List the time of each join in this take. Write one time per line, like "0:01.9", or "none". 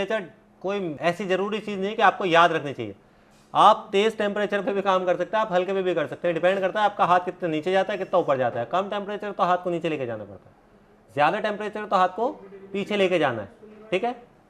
0:01.0